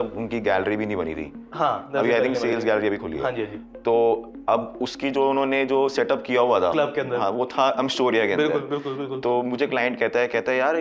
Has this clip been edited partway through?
no; 0 cuts

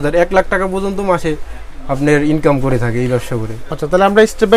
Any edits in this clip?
no; 0 cuts

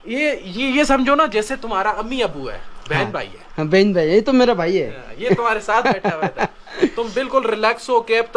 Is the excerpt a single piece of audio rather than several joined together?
yes; 0 cuts

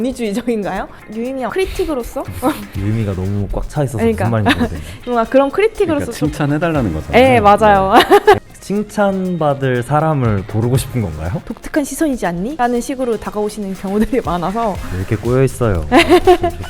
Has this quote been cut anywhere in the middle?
yes; 5 cuts; at 1.0 s, 2.7 s, 8.4 s, 11.4 s, 12.5 s

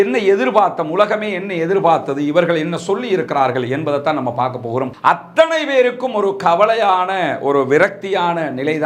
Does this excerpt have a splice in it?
yes; 1 cut; at 4.9 s

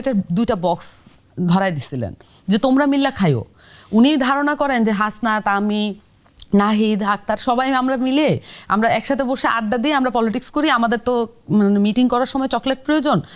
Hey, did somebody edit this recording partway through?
no; 0 cuts

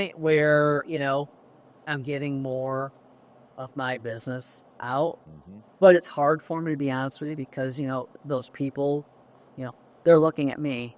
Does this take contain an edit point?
no; 0 cuts

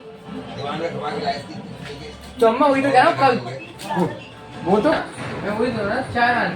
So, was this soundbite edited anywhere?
yes; 1 cut; at 5.0 s

